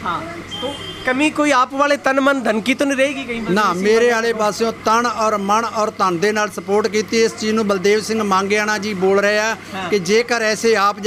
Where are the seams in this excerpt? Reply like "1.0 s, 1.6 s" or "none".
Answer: none